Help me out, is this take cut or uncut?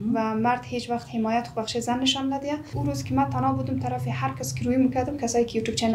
cut